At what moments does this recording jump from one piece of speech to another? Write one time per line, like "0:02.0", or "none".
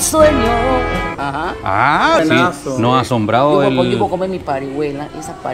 0:02.2